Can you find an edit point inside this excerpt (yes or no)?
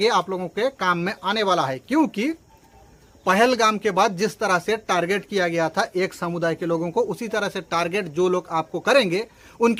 no